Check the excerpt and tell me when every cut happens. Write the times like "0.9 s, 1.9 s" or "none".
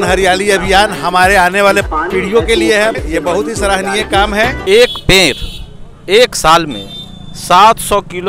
1.9 s, 3.0 s, 4.6 s